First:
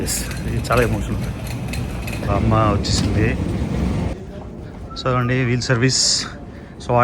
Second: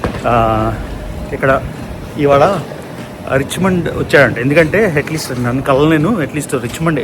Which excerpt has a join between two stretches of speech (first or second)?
first